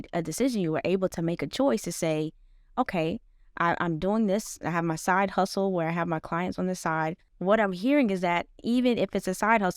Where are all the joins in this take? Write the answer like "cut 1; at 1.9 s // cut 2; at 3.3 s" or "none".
cut 1; at 7.3 s